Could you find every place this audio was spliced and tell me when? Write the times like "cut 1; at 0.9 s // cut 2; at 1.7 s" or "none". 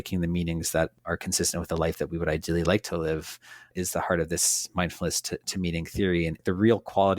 cut 1; at 0.9 s // cut 2; at 3.7 s // cut 3; at 6.4 s